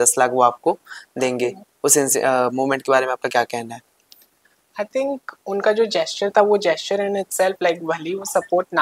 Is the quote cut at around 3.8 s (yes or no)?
no